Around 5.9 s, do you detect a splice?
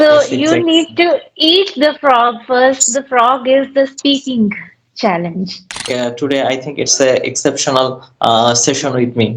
yes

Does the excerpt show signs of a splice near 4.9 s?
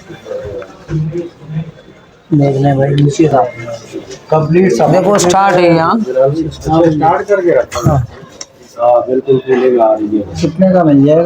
yes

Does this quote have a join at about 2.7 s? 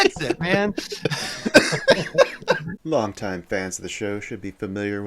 yes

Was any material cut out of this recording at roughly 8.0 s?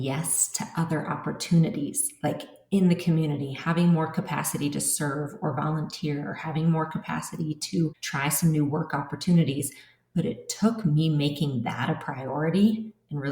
yes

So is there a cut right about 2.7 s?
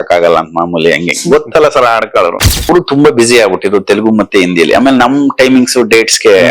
yes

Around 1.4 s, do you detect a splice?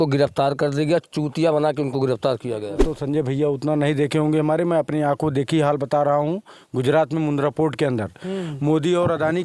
no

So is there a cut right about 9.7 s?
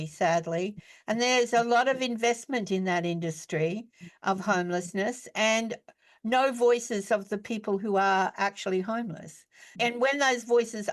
yes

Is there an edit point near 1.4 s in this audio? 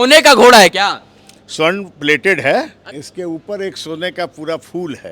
no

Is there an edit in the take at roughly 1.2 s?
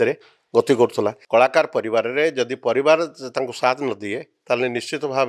yes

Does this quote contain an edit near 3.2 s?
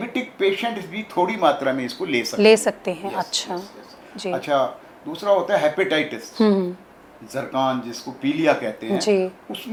no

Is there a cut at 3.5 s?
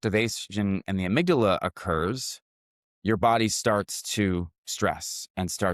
no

